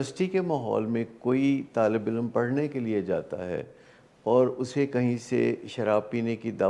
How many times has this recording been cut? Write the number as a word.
zero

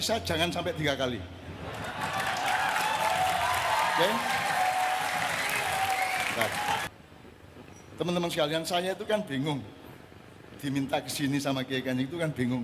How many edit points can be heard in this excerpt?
one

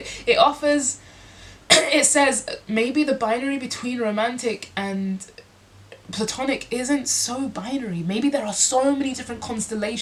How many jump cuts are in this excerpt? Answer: zero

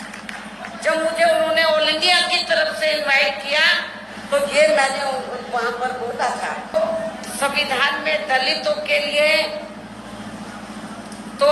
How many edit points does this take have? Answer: one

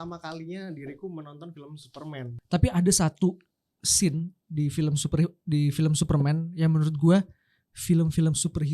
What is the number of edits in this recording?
one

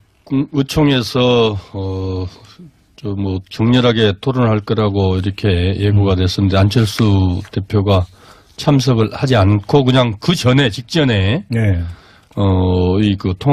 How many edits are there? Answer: one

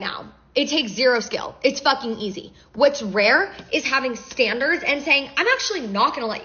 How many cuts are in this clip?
zero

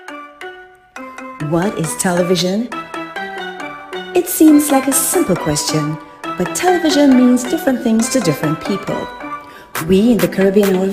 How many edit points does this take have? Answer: one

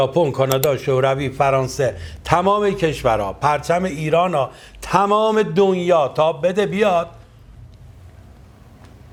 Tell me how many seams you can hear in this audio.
zero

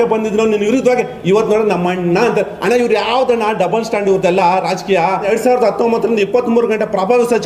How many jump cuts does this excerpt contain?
one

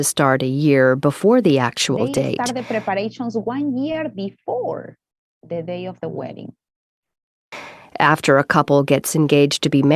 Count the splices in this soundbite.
zero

